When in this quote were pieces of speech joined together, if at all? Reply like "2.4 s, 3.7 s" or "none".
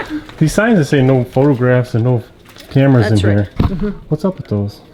none